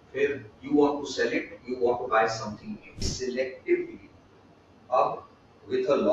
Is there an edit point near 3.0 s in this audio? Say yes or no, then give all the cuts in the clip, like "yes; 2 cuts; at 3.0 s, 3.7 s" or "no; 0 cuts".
yes; 1 cut; at 3.0 s